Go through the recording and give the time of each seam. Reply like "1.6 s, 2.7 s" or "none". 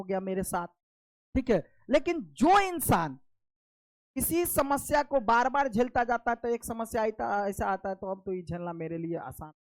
none